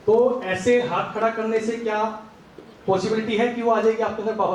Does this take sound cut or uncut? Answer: uncut